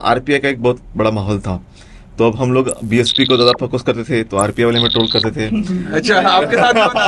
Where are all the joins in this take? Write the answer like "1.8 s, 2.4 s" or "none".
none